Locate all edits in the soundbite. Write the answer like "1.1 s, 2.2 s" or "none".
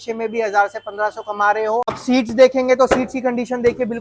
2.0 s